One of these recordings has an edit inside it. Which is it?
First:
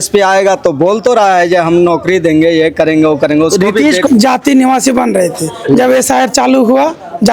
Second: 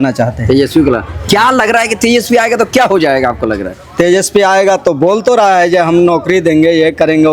first; 1 cut; at 4.0 s

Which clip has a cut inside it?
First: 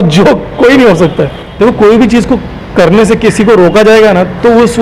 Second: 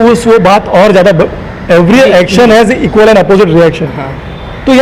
first; 1 cut; at 1.4 s

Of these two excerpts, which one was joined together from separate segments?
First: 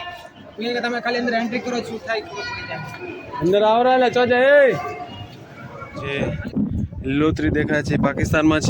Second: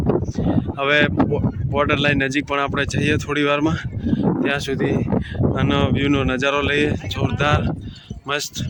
first; 1 cut; at 6.1 s

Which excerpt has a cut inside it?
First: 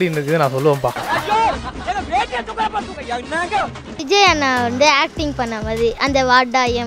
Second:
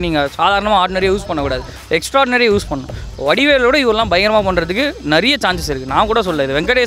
first; 2 cuts; at 1.0 s, 3.9 s

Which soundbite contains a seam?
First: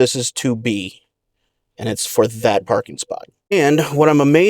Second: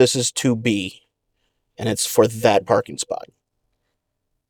first; 1 cut; at 3.5 s

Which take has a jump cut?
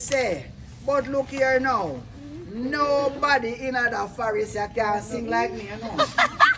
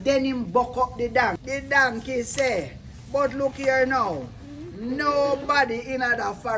second; 1 cut; at 1.4 s

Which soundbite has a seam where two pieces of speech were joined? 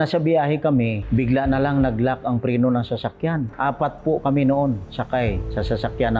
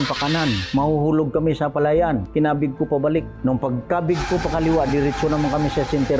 first; 1 cut; at 3.5 s

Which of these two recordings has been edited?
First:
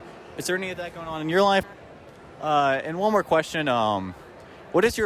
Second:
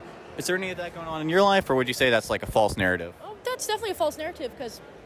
first; 1 cut; at 1.7 s

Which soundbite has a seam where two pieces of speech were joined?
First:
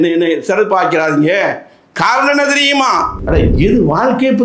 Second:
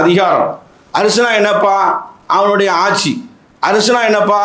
first; 1 cut; at 3.2 s

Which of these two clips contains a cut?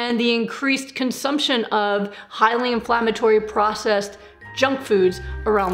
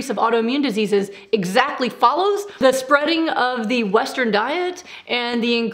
second; 1 cut; at 2.5 s

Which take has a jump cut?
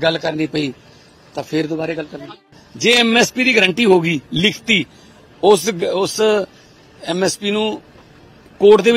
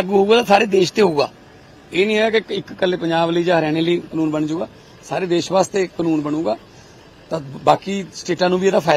first; 1 cut; at 2.6 s

